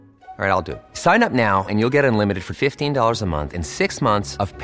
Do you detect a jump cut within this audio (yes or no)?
no